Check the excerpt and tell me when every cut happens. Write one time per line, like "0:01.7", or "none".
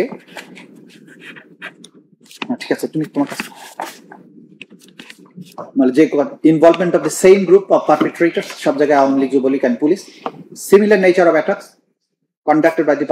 none